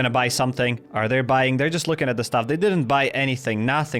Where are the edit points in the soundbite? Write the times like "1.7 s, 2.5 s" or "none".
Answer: none